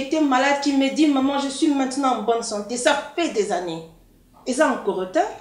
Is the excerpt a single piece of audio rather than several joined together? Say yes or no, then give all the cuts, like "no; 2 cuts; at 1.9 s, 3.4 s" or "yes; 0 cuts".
yes; 0 cuts